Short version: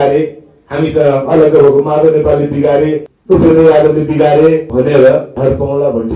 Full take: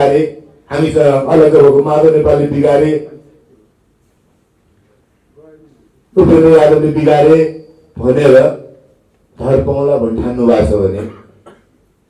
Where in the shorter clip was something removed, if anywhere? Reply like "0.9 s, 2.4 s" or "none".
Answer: 3.1 s, 4.7 s, 5.3 s